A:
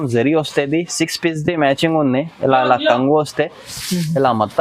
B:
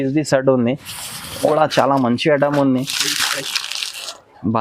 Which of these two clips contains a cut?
B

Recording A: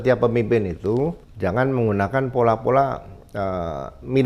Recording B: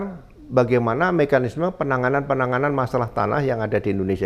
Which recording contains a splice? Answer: A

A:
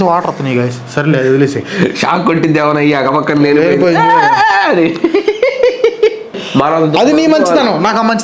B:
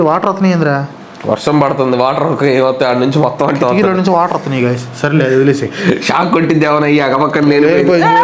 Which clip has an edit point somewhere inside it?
A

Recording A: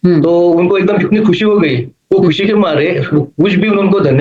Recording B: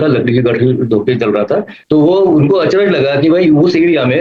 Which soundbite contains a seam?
B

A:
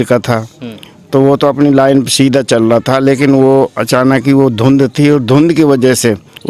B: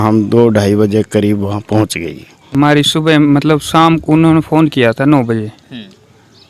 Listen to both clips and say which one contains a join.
B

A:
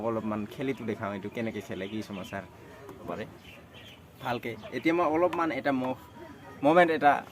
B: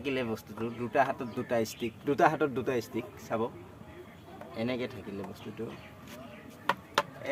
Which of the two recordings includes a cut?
A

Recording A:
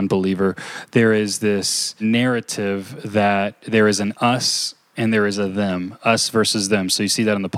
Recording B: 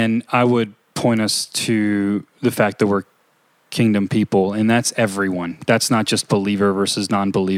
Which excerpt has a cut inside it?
A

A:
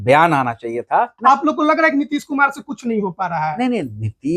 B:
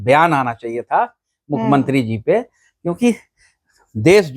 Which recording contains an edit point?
A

